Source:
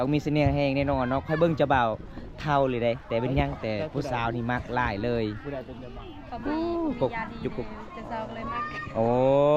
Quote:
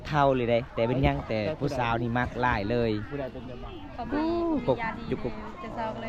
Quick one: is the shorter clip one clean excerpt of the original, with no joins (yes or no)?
yes